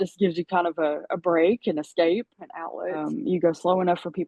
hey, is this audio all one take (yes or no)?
no